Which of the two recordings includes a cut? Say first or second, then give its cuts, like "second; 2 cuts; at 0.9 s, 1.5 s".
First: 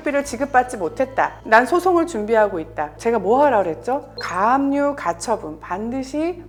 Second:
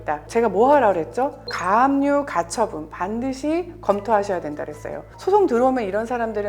second; 1 cut; at 5.0 s